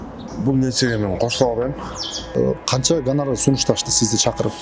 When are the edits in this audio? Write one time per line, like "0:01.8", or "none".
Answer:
0:02.3